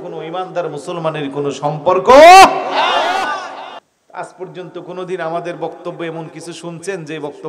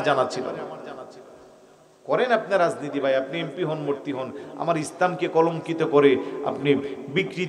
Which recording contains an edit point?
first; 1 cut; at 3.8 s

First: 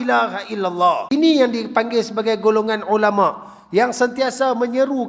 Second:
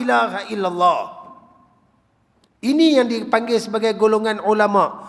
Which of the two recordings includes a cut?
first; 1 cut; at 1.0 s

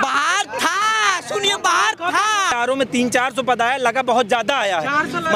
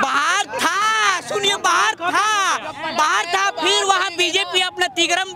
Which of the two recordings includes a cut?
first; 1 cut; at 2.5 s

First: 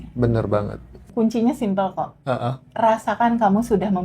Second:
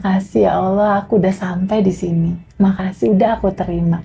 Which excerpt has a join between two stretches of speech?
first; 1 cut; at 1.0 s

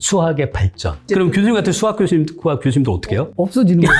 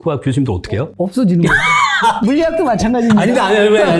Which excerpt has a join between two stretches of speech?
first; 1 cut; at 0.9 s

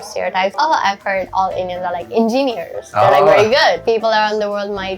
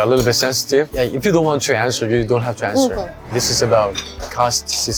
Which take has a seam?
first; 1 cut; at 3.8 s

